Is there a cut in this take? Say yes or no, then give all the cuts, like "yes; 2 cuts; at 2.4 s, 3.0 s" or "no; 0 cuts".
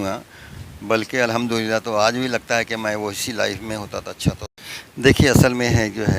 yes; 1 cut; at 4.4 s